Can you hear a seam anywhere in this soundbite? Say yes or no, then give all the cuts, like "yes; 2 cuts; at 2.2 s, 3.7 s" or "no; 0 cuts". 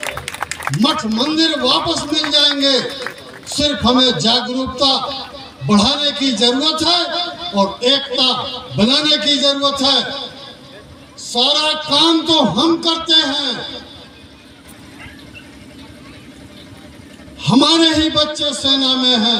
no; 0 cuts